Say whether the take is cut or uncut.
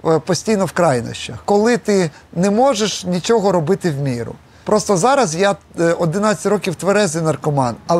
cut